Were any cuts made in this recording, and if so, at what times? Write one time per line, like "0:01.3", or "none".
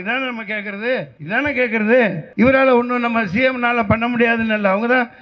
0:01.2
0:02.2